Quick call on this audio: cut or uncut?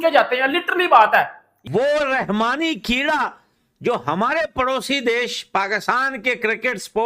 cut